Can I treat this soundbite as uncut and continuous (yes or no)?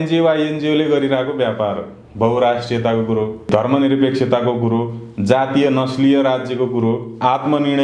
yes